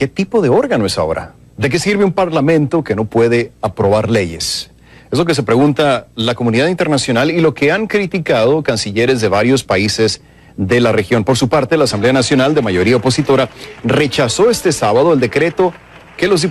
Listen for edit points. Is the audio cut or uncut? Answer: uncut